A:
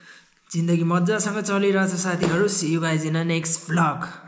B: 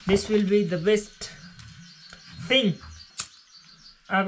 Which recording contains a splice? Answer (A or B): B